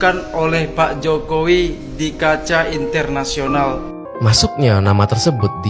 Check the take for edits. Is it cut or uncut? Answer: cut